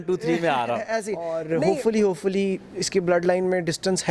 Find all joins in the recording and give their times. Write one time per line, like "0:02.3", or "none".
0:01.4